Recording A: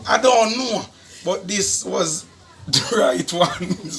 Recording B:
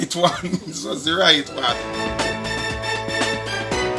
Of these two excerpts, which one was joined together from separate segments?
B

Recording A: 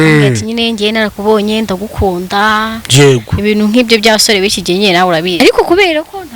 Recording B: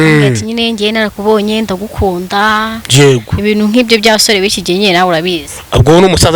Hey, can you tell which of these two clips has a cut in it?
A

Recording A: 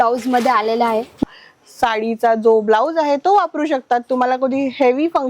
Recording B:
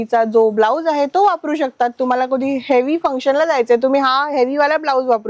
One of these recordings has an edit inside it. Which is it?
A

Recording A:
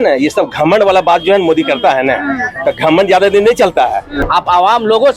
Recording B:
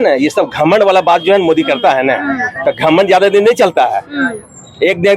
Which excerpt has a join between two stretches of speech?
A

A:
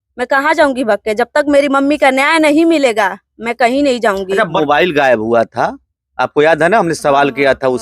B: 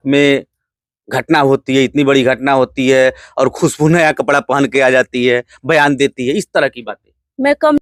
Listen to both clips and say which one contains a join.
A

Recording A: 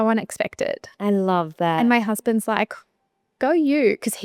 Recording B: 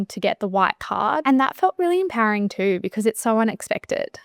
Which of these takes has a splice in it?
B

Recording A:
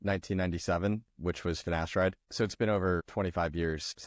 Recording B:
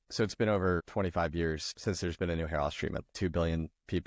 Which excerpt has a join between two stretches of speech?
B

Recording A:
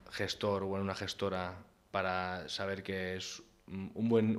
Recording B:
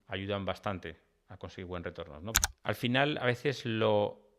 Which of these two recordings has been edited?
B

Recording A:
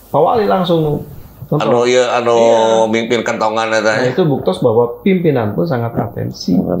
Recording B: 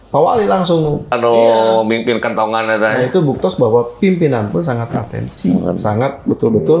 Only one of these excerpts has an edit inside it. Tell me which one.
B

